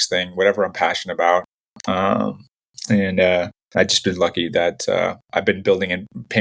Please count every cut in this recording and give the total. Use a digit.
1